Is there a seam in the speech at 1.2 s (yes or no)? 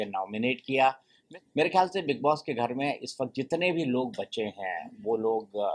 yes